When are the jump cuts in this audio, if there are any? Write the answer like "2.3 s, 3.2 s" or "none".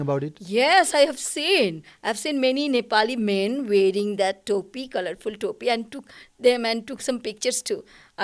none